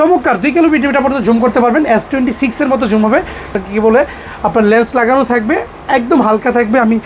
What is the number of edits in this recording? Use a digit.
1